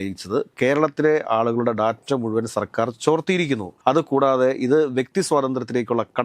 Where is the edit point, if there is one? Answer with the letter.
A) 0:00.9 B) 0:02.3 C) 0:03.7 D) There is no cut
C